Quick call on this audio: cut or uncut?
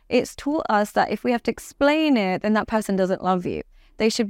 uncut